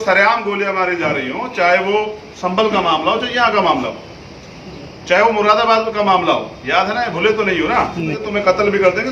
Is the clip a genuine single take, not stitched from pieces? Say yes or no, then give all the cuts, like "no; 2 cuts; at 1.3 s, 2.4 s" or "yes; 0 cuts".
no; 1 cut; at 8.2 s